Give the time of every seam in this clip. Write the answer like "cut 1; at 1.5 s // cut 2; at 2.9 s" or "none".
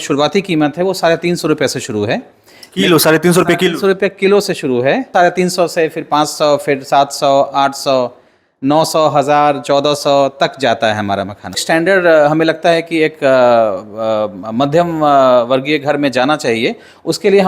cut 1; at 5.1 s // cut 2; at 11.6 s